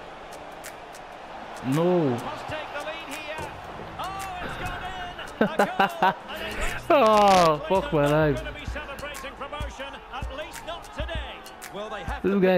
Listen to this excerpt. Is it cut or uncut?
uncut